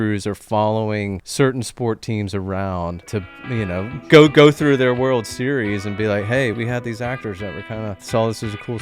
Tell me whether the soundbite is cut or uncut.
cut